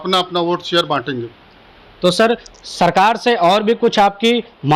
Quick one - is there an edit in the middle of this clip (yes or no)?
no